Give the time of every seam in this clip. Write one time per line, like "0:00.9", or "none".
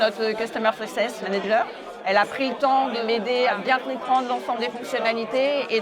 0:01.3